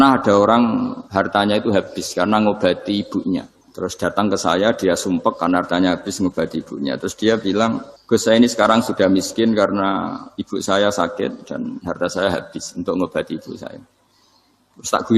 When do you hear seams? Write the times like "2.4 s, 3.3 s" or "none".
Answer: 1.0 s, 3.6 s, 7.9 s